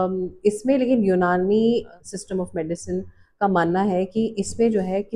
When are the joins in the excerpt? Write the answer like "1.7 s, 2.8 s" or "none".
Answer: none

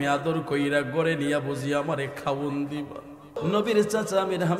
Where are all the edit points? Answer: 3.4 s

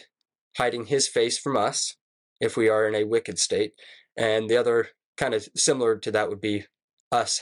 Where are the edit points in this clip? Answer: none

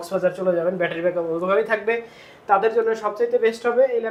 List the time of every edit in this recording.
none

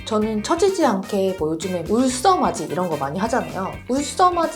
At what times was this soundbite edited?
none

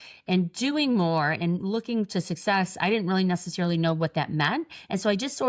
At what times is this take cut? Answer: none

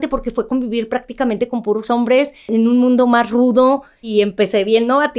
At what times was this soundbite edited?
2.5 s, 4.1 s

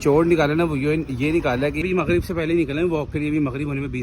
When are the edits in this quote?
1.8 s

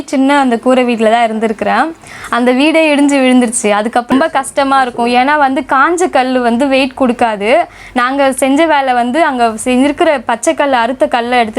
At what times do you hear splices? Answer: 4.1 s

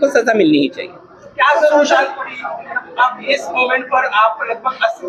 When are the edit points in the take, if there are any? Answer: none

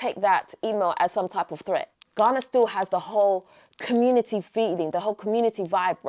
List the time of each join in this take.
2.0 s

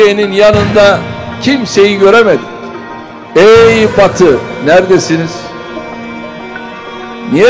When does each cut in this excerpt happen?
none

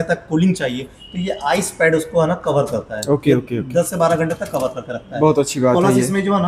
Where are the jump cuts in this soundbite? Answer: none

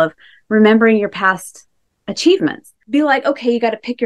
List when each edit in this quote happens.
2.7 s

